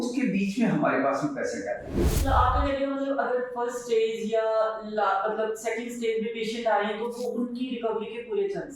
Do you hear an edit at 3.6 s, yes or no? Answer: no